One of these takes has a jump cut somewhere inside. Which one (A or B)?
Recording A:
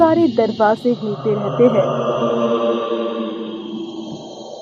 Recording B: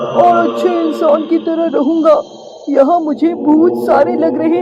A